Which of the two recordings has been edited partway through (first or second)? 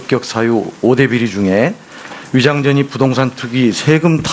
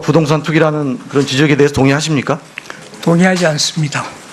first